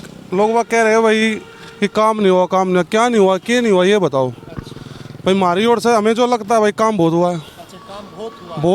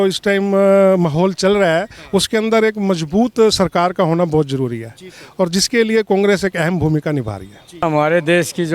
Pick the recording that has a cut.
second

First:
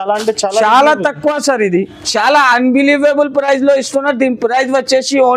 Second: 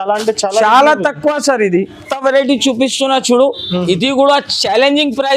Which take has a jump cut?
first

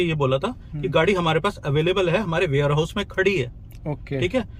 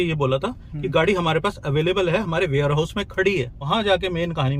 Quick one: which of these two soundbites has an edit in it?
second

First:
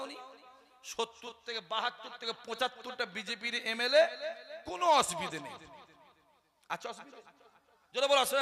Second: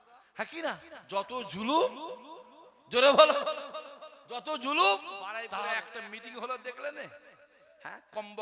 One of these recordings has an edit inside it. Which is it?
second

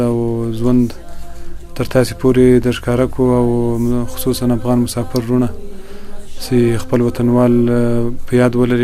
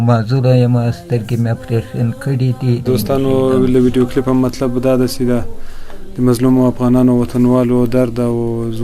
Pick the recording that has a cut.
second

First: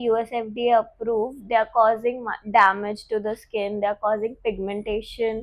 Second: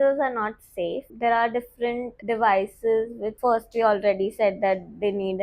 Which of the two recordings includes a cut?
second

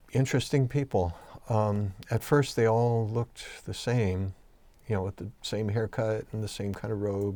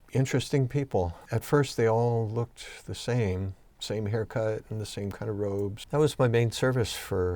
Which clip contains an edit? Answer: second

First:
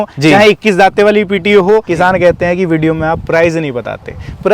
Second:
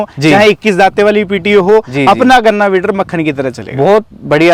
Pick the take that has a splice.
first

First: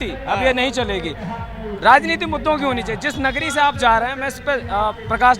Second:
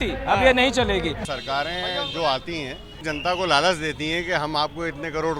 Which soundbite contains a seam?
second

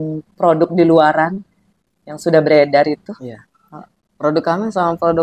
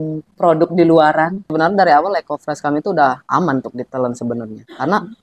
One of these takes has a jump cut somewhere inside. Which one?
second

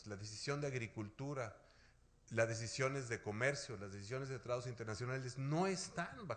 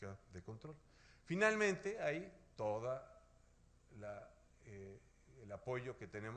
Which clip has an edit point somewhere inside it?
first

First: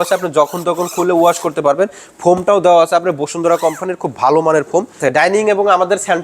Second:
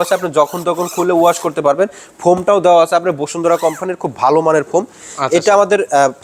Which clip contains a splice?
first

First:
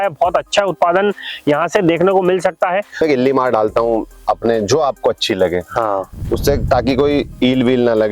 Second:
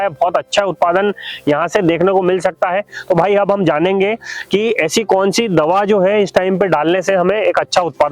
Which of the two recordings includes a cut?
first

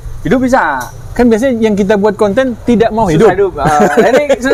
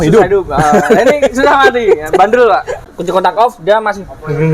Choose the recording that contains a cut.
second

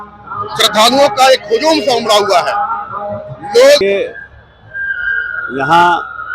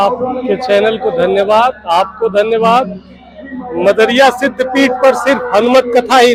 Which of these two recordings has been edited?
first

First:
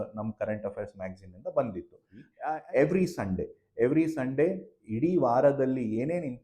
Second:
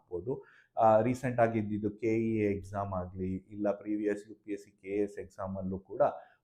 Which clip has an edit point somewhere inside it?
first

